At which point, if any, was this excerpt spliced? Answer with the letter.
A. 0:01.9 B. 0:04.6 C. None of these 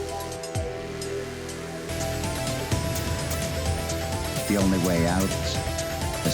A